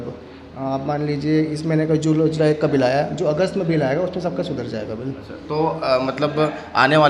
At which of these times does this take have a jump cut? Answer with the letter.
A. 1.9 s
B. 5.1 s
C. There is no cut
C